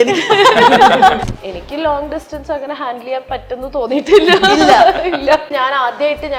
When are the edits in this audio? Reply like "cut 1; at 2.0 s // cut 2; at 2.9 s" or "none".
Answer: cut 1; at 1.2 s // cut 2; at 5.5 s